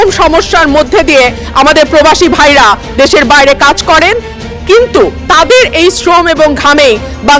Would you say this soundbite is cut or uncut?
uncut